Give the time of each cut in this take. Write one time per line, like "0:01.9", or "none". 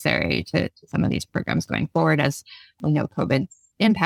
0:02.8